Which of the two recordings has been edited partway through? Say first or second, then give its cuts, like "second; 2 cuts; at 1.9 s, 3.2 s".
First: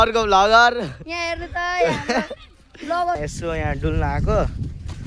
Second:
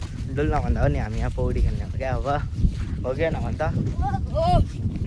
first; 1 cut; at 3.2 s